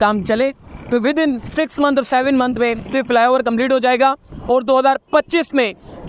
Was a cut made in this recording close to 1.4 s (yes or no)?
no